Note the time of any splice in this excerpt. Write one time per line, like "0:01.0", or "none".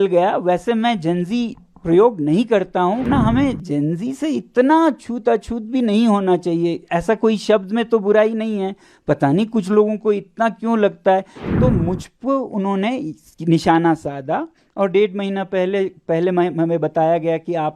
0:03.1
0:11.4